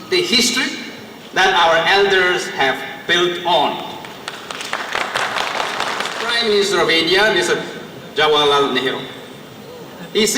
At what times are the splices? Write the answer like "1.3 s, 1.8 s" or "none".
6.2 s